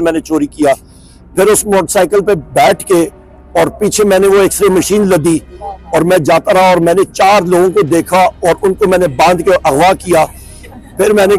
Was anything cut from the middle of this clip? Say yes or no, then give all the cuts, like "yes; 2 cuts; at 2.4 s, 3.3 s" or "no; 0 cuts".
no; 0 cuts